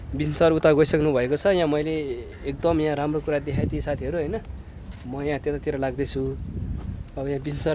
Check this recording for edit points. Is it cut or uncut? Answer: uncut